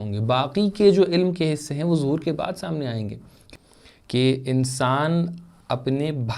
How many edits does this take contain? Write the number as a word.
one